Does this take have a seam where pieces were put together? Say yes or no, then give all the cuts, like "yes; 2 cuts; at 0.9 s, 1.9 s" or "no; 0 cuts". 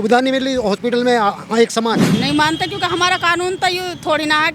yes; 1 cut; at 2.1 s